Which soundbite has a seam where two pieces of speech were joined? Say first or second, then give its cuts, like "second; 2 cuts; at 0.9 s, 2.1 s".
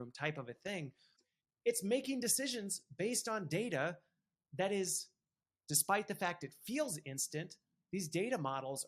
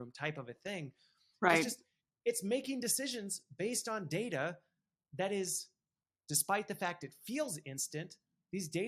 first; 1 cut; at 1.2 s